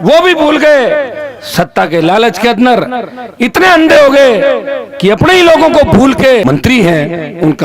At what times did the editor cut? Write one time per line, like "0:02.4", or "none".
0:06.4